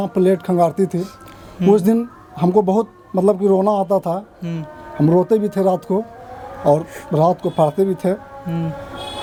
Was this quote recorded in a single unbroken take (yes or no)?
yes